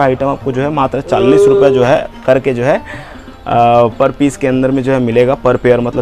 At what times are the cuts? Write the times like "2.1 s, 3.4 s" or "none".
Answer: none